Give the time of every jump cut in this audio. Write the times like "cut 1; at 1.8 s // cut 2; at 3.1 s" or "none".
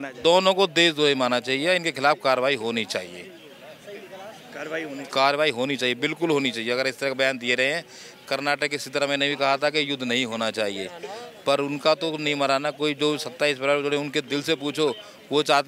none